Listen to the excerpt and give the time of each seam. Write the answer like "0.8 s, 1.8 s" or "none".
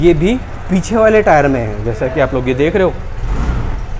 none